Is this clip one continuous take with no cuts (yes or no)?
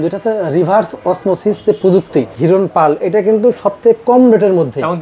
no